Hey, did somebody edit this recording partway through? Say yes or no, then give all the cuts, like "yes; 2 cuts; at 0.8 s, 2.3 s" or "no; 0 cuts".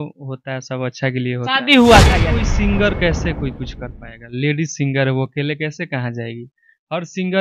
yes; 1 cut; at 2.3 s